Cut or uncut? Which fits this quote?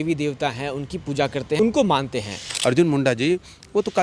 cut